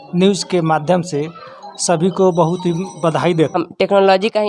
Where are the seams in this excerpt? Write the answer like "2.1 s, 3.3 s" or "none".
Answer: 3.5 s